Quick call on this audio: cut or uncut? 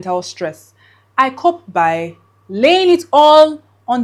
uncut